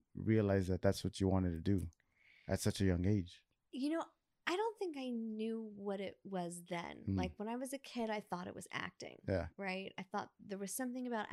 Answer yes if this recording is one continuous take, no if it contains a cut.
yes